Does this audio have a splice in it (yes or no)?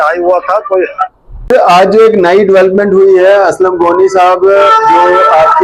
yes